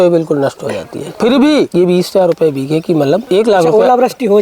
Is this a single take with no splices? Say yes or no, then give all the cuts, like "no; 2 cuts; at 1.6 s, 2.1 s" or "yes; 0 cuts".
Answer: yes; 0 cuts